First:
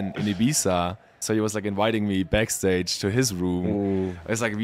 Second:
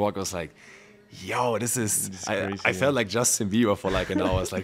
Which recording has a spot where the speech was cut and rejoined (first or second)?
first